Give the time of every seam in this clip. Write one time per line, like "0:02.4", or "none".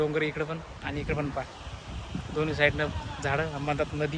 none